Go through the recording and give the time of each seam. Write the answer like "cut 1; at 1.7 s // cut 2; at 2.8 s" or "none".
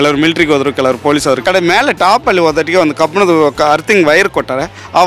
cut 1; at 1.4 s